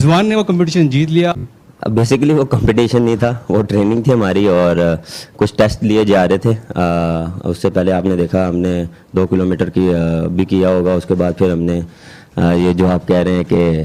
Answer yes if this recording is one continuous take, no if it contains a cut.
no